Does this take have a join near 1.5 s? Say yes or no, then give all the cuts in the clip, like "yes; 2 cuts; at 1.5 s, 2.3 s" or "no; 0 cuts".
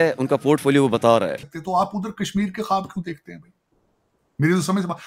yes; 1 cut; at 1.5 s